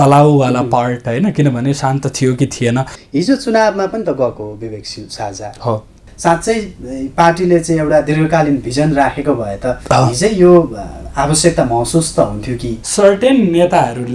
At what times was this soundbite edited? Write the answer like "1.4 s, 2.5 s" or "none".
3.0 s, 6.0 s, 12.8 s